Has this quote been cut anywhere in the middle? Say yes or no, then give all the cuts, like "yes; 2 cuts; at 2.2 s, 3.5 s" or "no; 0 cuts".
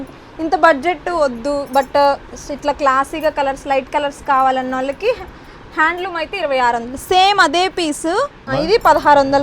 yes; 1 cut; at 8.5 s